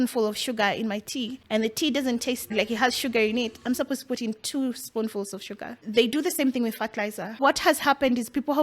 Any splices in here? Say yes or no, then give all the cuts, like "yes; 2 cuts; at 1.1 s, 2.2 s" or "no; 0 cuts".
yes; 4 cuts; at 1.4 s, 2.5 s, 5.8 s, 7.4 s